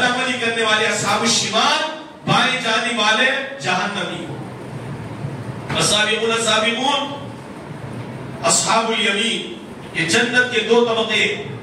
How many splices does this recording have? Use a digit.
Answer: 0